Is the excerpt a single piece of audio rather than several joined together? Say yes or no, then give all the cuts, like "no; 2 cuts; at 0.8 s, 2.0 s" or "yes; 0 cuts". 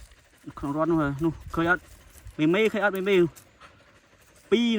yes; 0 cuts